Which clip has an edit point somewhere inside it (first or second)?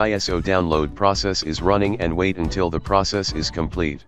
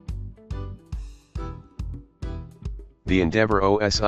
second